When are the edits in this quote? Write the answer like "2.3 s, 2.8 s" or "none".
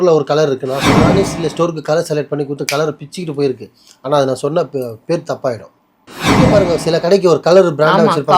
1.2 s, 6.4 s